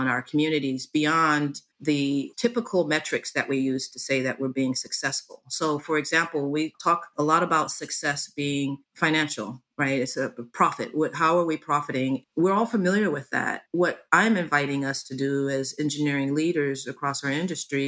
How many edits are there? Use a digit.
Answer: 2